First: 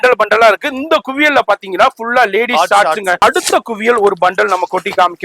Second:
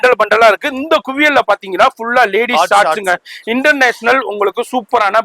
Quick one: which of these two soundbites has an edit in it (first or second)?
first